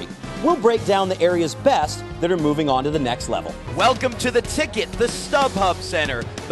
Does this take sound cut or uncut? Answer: cut